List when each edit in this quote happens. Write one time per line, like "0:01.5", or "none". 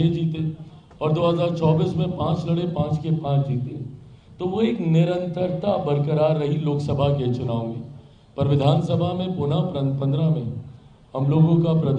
none